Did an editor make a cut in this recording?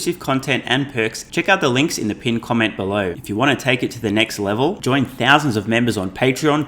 yes; 2 cuts; at 1.2 s, 3.2 s

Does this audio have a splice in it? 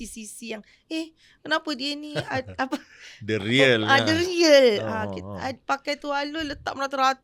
no; 0 cuts

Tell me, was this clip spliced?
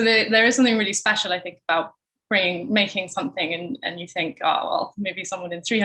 no; 0 cuts

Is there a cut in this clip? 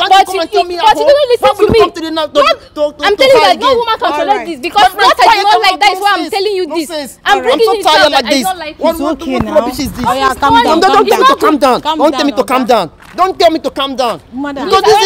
no; 0 cuts

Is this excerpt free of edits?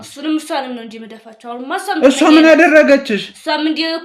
yes; 0 cuts

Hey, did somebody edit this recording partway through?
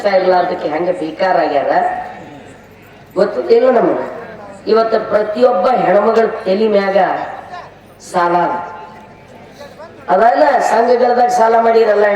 no; 0 cuts

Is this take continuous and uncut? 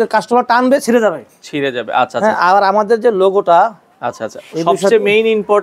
yes; 0 cuts

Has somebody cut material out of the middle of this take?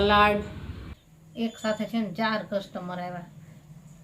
yes; 1 cut; at 0.9 s

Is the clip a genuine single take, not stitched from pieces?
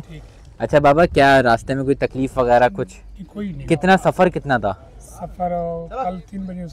yes; 0 cuts

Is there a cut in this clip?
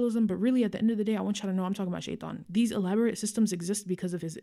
no; 0 cuts

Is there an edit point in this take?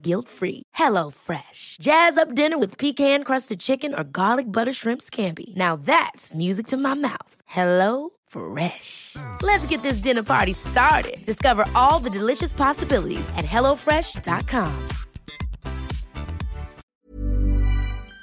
yes; 1 cut; at 16.9 s

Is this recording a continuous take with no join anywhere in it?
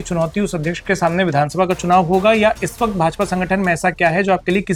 yes; 0 cuts

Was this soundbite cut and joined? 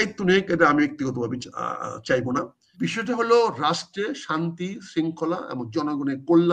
yes; 1 cut; at 2.6 s

